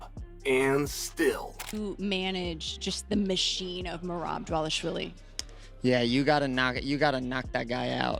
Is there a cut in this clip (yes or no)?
yes